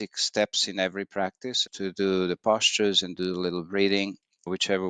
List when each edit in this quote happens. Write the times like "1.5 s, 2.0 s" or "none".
none